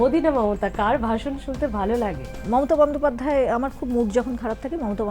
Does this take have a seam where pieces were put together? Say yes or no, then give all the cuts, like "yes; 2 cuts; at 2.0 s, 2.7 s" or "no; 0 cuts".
yes; 1 cut; at 2.3 s